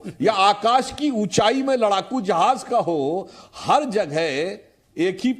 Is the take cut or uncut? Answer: uncut